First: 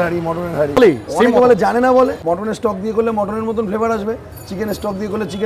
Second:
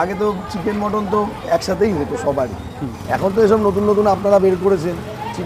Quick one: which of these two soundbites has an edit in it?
first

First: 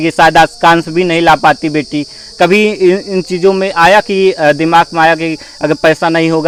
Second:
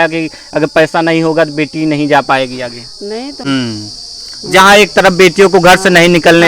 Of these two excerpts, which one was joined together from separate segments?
second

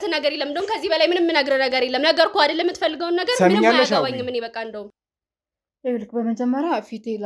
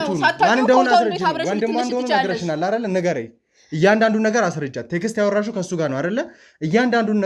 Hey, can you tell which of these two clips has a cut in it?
first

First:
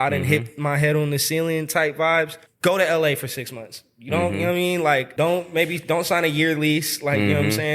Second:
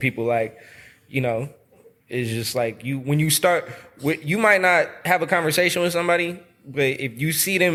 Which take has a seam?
first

